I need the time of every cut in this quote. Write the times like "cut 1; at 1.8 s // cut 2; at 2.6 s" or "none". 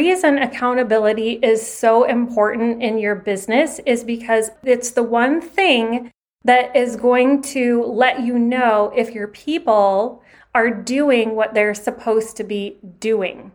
cut 1; at 4.5 s